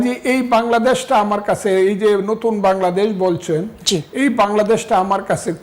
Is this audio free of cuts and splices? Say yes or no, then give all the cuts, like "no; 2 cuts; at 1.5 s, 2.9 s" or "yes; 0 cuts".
yes; 0 cuts